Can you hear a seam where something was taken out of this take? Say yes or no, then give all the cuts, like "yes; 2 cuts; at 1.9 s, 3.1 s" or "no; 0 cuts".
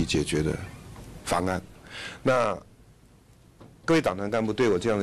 no; 0 cuts